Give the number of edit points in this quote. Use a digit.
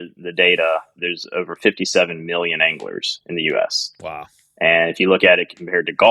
1